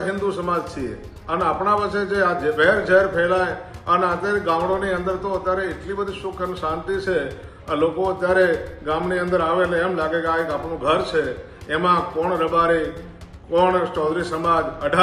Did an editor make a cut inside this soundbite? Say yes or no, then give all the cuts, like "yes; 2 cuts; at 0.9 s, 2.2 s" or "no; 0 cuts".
no; 0 cuts